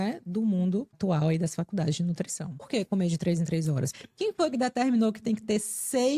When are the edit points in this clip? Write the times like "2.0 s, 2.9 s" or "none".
0.9 s, 2.7 s, 3.9 s

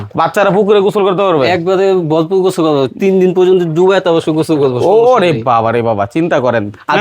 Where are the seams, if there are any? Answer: none

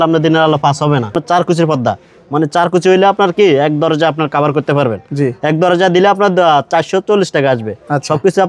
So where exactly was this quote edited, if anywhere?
1.2 s

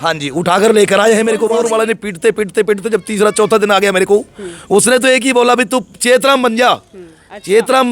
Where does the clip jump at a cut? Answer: 1.4 s

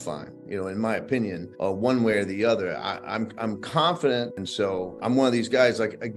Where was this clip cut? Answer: 4.3 s

